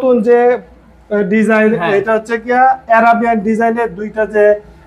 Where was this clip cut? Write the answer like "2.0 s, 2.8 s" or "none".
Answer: none